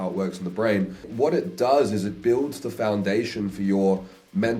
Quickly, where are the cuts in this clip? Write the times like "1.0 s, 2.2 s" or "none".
1.1 s